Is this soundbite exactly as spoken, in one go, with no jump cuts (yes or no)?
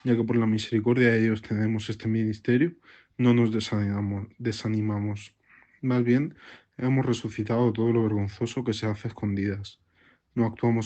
yes